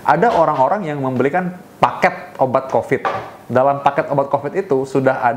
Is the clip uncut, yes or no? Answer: yes